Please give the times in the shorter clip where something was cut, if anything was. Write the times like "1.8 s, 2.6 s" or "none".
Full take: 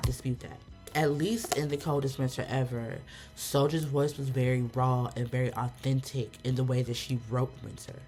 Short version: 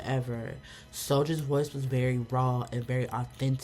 none